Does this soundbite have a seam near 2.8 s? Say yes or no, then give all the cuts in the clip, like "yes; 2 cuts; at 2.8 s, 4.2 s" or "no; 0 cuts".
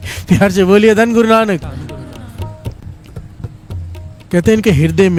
no; 0 cuts